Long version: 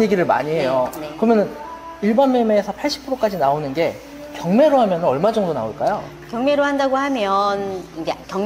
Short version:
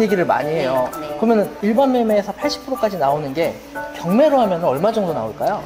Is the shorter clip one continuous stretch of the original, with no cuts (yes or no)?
no